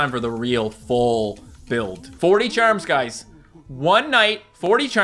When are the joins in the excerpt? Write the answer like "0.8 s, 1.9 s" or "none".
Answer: 2.1 s